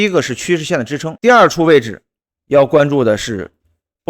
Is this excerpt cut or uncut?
cut